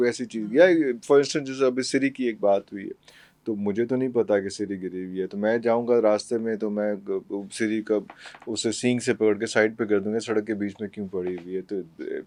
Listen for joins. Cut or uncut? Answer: uncut